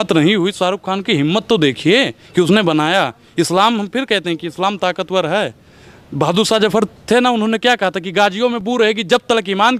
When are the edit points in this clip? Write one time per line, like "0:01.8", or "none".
none

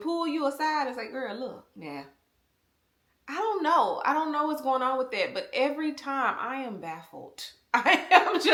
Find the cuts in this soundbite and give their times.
none

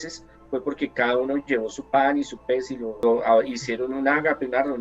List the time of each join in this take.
0:02.9

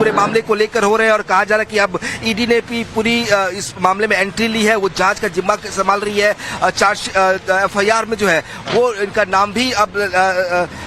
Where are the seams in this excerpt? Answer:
0:02.9

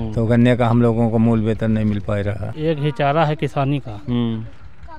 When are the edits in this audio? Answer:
0:02.5

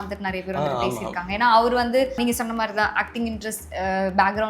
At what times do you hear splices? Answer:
0:02.2

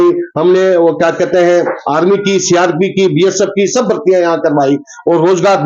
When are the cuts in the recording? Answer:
none

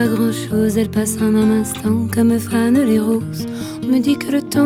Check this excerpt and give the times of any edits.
none

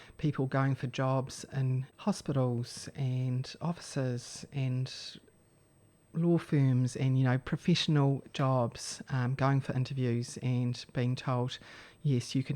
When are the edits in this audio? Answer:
0:01.9

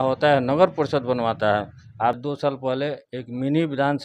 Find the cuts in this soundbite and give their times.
0:02.2

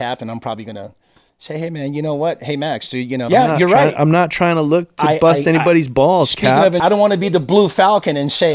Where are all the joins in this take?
0:03.3
0:06.8

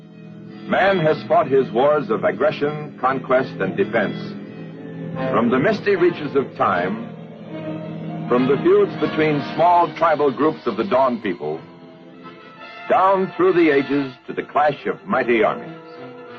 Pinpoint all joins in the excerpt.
0:01.5

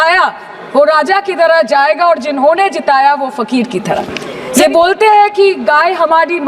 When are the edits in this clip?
0:04.5

